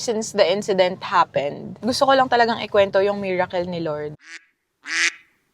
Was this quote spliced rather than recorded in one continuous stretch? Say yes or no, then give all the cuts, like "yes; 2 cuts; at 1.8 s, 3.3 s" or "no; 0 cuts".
yes; 2 cuts; at 1.8 s, 4.2 s